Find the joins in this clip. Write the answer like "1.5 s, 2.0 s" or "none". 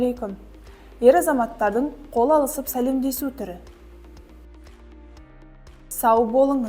3.6 s, 5.6 s